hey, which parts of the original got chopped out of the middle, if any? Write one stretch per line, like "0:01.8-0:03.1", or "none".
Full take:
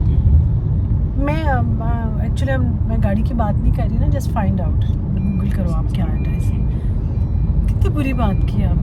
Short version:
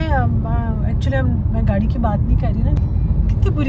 0:04.1-0:07.2